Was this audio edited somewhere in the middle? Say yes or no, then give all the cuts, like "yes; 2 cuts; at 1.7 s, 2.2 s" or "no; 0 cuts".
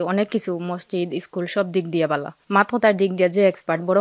yes; 1 cut; at 2.3 s